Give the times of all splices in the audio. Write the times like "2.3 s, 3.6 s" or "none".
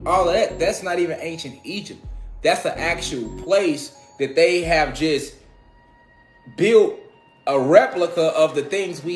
none